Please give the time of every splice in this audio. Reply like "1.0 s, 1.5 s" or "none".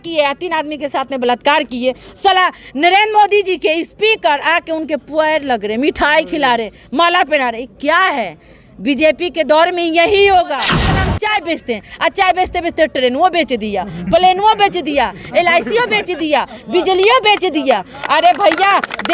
10.9 s